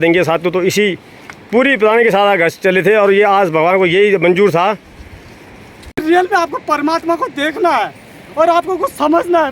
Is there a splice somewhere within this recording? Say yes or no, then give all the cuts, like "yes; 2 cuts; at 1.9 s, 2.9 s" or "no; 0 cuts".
yes; 1 cut; at 6.0 s